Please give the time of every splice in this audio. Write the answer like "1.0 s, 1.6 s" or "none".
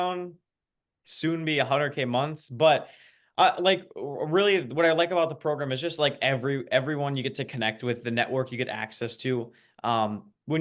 none